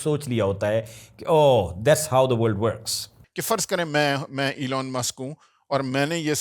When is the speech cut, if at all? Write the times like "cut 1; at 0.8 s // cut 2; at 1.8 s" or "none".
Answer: cut 1; at 3.3 s